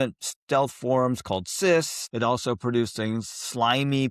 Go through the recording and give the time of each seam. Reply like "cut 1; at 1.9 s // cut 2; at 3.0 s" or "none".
cut 1; at 2.0 s